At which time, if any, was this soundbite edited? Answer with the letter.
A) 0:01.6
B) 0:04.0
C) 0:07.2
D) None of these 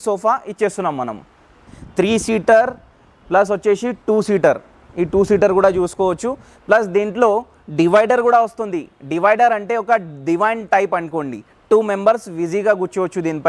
A